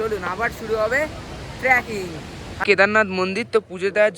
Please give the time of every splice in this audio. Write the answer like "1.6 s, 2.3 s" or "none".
2.6 s